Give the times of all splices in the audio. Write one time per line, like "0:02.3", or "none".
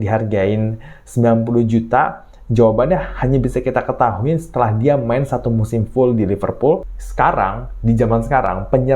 0:07.0